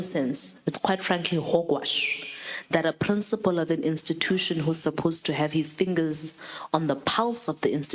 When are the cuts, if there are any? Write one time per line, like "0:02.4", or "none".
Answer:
none